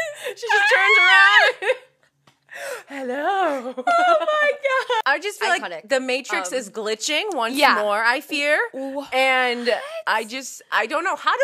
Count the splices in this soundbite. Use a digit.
1